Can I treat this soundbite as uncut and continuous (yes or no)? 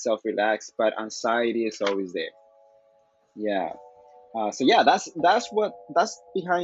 yes